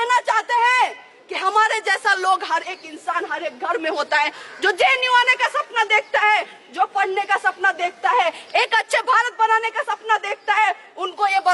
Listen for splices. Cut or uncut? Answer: uncut